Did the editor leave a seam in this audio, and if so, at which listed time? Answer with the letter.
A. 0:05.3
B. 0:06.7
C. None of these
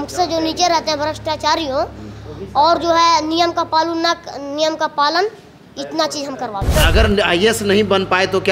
B